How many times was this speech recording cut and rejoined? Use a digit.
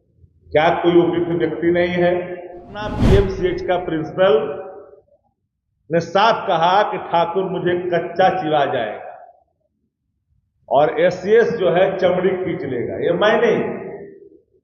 1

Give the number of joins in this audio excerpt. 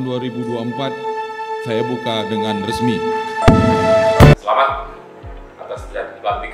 1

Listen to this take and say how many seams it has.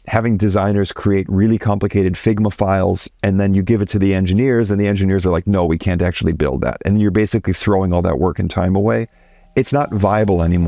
0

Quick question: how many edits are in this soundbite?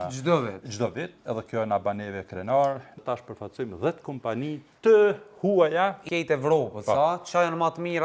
2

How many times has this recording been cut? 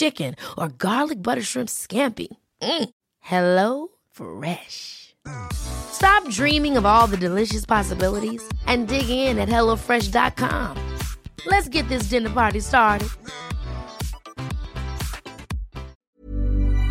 1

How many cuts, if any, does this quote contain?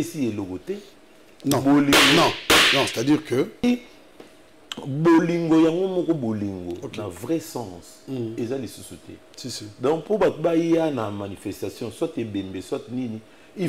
1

